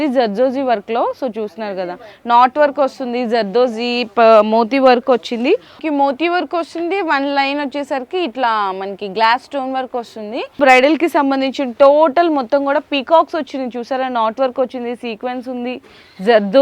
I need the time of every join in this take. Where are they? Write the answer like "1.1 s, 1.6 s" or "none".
5.8 s, 10.5 s